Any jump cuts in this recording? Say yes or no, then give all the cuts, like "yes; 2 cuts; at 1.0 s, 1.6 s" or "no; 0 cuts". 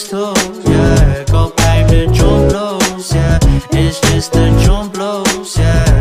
yes; 1 cut; at 1.6 s